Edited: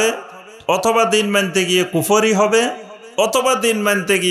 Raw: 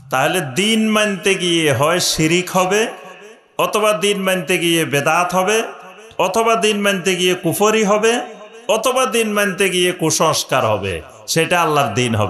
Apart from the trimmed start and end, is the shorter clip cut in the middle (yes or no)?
no